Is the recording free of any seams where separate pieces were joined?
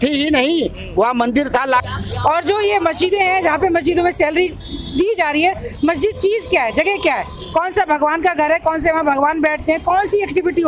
no; 1 cut; at 1.9 s

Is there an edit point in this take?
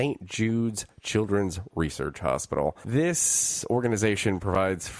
yes; 1 cut; at 2.8 s

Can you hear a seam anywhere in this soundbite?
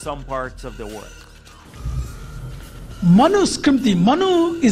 yes; 1 cut; at 1.6 s

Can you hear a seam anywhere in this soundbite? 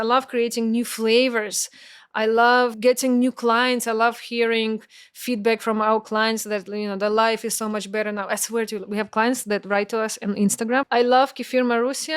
yes; 2 cuts; at 2.8 s, 10.8 s

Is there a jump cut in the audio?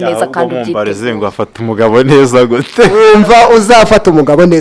yes; 1 cut; at 2.9 s

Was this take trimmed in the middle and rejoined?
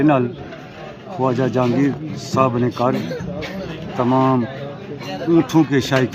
no; 0 cuts

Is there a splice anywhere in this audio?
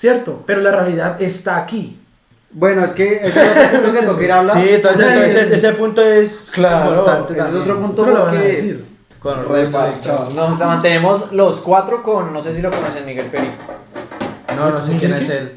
yes; 1 cut; at 9.1 s

